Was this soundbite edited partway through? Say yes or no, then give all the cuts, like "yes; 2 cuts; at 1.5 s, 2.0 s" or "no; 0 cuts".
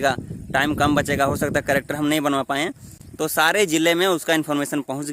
no; 0 cuts